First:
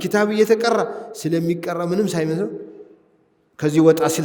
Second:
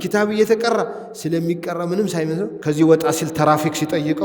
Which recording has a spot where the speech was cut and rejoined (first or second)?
second